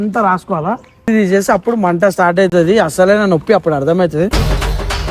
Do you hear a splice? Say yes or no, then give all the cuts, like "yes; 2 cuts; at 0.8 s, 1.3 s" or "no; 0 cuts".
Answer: yes; 1 cut; at 1.1 s